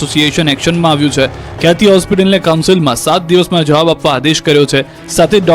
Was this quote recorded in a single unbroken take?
no; 1 cut; at 1.0 s

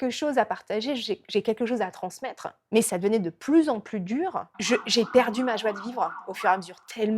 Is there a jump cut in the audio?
yes; 1 cut; at 4.4 s

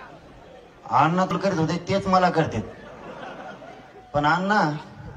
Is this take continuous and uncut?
yes; 0 cuts

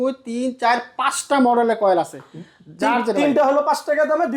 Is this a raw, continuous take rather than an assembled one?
yes; 0 cuts

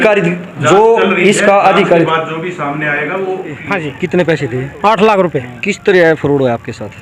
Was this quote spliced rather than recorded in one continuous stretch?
yes; 1 cut; at 3.6 s

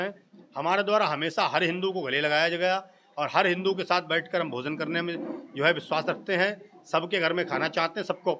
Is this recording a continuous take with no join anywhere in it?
yes; 0 cuts

